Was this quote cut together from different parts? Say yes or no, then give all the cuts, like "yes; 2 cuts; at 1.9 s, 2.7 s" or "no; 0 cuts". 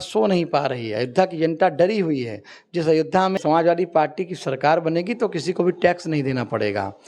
yes; 1 cut; at 3.4 s